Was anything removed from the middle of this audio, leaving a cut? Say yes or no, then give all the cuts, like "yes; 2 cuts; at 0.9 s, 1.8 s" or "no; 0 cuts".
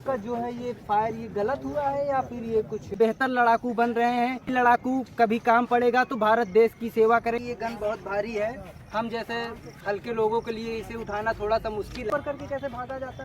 yes; 4 cuts; at 2.9 s, 4.5 s, 7.4 s, 12.1 s